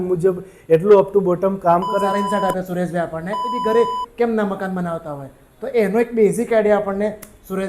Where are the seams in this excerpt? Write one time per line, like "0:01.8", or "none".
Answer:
0:02.1
0:03.6